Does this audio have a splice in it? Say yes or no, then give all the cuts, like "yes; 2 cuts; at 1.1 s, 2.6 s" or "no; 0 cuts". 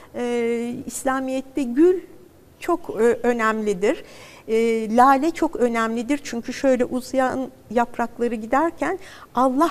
no; 0 cuts